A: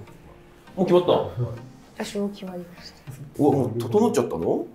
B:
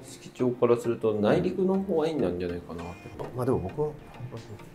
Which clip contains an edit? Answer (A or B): B